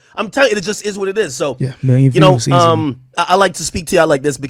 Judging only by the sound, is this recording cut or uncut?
cut